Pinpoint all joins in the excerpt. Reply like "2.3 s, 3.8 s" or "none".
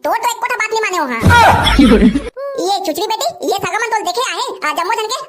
2.3 s